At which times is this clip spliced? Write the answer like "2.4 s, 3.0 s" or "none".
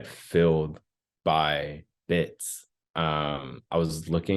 none